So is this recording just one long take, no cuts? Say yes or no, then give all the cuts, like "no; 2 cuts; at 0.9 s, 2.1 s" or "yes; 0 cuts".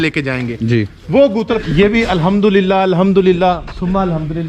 no; 1 cut; at 1.6 s